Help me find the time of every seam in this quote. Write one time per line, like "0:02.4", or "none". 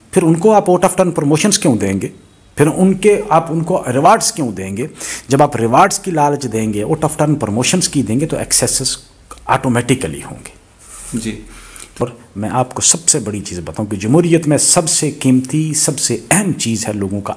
0:12.0

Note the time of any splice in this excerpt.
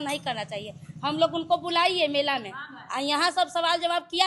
none

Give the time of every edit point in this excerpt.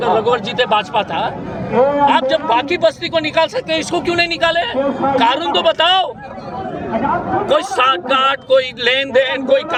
none

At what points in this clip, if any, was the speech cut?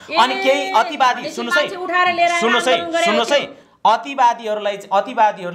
none

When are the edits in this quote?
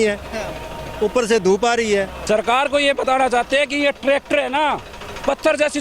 0:02.2

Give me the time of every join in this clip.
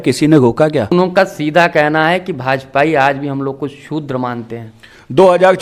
0:00.9

